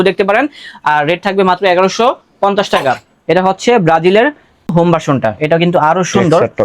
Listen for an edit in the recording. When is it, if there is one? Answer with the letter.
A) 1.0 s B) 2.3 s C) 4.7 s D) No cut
C